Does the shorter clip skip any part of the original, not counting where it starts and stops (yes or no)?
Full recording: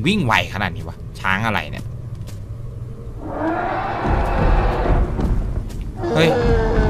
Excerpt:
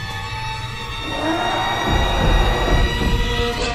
no